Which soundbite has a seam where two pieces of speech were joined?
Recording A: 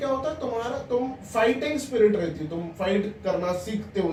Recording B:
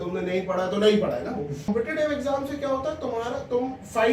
B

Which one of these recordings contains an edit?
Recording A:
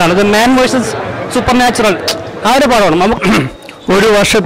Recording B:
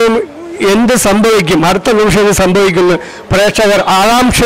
A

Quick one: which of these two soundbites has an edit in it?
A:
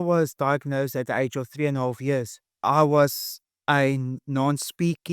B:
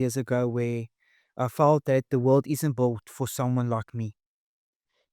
A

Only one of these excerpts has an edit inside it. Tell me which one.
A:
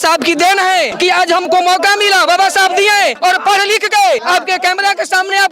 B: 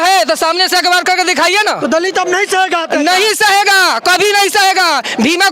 A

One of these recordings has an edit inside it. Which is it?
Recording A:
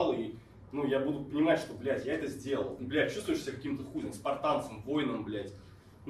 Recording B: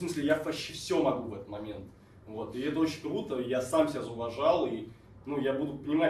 A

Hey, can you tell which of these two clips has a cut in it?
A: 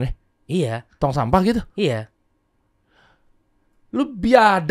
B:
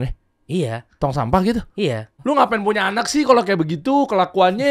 B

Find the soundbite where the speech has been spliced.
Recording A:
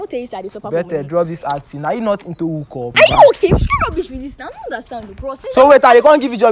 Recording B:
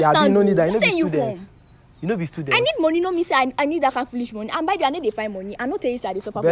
A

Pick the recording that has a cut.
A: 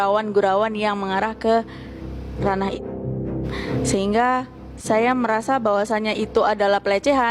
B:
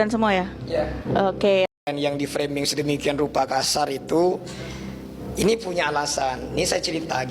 B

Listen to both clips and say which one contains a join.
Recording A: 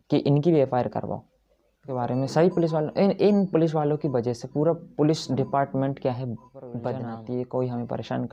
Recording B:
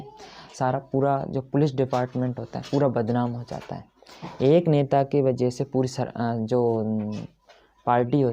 A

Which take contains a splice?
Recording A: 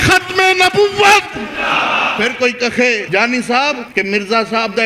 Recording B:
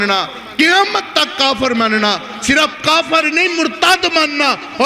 A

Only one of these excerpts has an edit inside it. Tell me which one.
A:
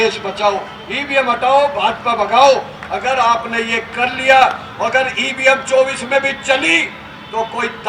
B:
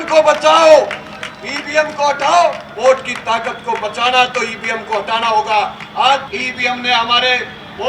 B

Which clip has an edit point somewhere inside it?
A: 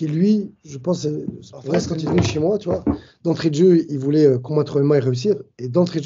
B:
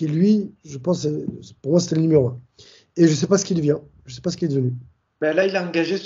A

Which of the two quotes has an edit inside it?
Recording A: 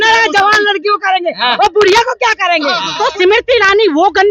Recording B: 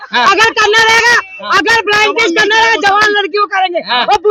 A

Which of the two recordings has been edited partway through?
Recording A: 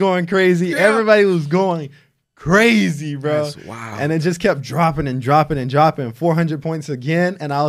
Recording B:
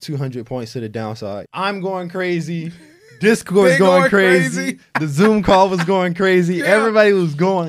B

